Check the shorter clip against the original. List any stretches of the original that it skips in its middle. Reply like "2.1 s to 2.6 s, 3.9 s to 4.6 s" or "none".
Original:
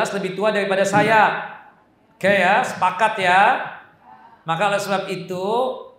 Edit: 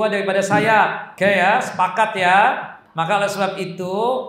1.5 s to 2.1 s, 3.8 s to 4.3 s